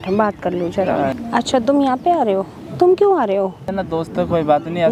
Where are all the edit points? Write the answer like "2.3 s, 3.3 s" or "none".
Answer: 1.1 s, 3.7 s